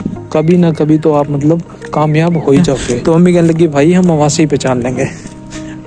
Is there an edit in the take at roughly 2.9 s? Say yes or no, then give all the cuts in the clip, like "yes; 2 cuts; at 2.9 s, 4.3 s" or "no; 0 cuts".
yes; 1 cut; at 2.9 s